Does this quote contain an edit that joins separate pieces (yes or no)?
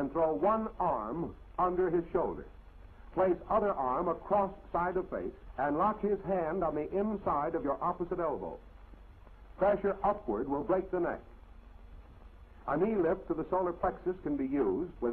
no